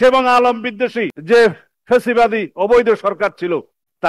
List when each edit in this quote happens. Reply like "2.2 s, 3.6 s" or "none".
1.1 s